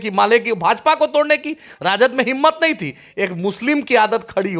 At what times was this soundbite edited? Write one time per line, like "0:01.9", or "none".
none